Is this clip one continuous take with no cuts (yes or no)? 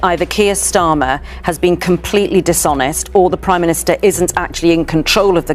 yes